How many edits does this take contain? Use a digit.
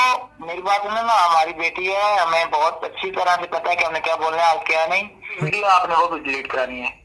1